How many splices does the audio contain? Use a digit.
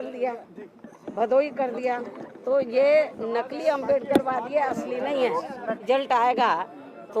1